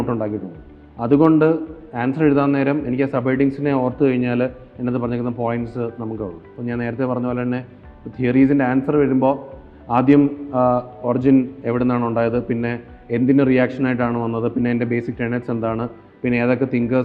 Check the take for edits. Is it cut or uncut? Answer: uncut